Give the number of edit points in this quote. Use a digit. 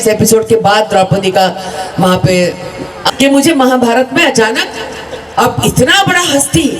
1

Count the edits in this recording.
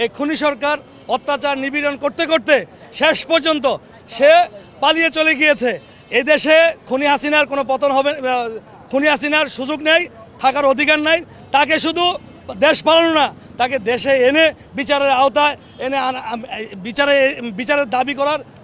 0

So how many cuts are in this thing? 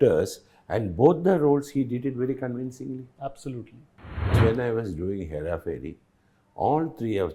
1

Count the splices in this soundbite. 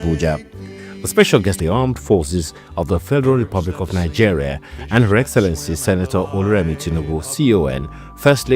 1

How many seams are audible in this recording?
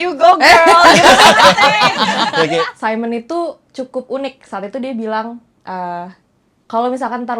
1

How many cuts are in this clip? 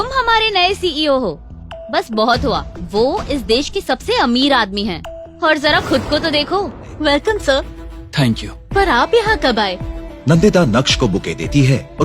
1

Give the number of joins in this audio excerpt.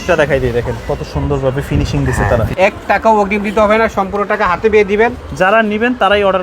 2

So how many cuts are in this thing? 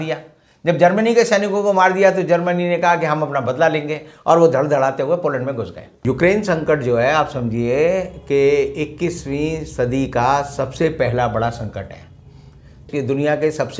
2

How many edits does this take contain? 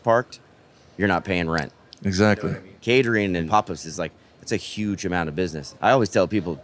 3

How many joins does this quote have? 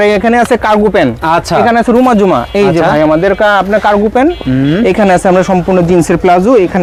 0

